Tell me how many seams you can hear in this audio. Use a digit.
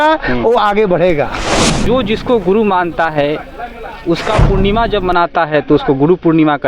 1